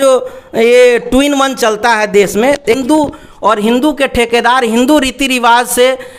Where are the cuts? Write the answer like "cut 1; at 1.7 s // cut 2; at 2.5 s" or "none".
cut 1; at 2.8 s

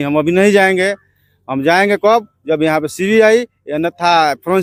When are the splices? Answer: none

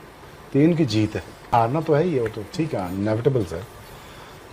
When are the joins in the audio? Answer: cut 1; at 1.5 s

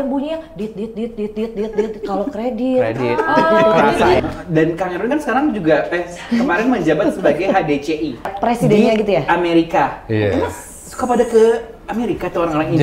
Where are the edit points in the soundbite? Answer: cut 1; at 4.2 s // cut 2; at 8.3 s

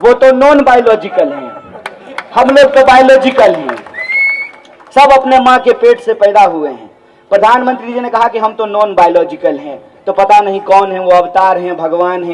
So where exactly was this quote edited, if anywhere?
none

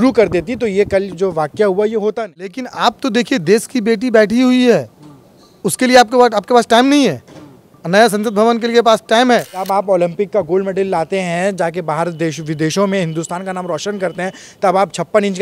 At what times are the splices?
cut 1; at 2.6 s // cut 2; at 9.6 s

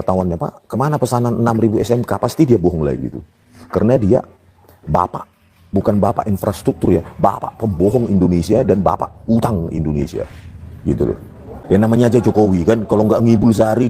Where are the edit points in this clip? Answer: cut 1; at 11.5 s

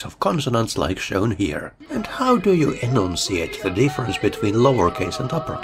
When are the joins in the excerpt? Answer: cut 1; at 1.7 s

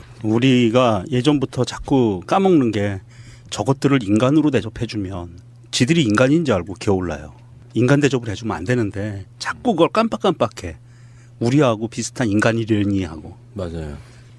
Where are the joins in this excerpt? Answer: cut 1; at 9.6 s

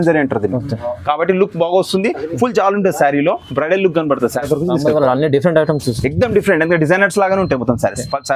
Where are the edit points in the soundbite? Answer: cut 1; at 4.4 s

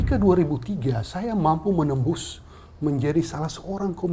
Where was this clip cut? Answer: none

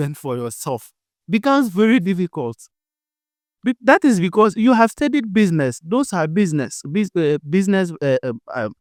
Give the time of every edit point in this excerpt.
none

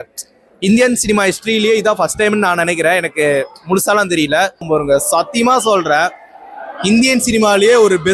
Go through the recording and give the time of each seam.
cut 1; at 4.6 s

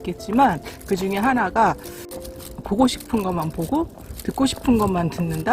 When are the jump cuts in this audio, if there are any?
cut 1; at 2.2 s

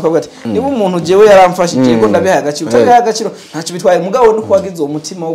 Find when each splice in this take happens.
none

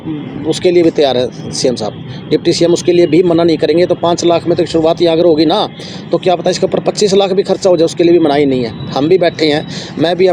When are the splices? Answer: none

